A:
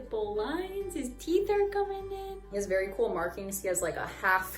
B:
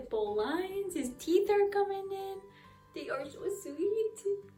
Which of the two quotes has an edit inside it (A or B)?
A